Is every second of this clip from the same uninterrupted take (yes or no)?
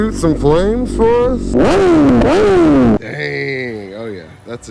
no